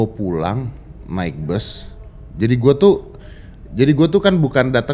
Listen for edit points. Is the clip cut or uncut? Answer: uncut